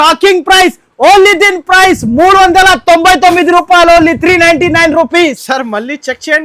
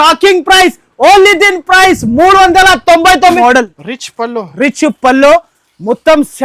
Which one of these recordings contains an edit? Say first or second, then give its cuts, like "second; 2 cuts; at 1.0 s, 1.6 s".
second; 1 cut; at 3.4 s